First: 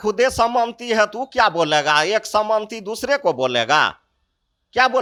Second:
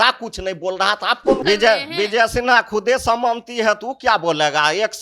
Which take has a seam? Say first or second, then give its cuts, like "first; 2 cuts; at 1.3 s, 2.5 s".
second; 1 cut; at 1.4 s